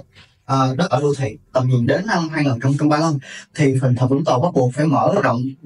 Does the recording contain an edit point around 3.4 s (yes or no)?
no